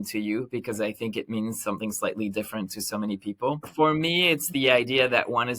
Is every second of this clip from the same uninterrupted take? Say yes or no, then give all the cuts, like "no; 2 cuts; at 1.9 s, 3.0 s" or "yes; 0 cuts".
yes; 0 cuts